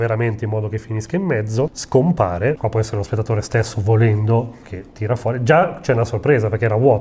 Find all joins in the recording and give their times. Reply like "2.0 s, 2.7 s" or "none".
1.8 s, 2.6 s